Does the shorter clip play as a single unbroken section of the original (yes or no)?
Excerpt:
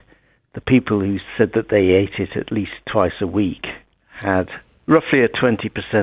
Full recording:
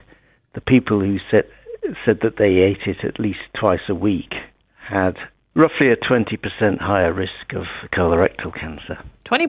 no